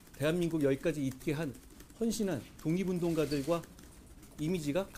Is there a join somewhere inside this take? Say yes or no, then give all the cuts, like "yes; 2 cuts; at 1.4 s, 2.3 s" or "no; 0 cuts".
no; 0 cuts